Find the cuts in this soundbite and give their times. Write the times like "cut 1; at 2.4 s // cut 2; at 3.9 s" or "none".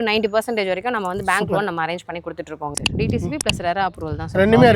cut 1; at 2.7 s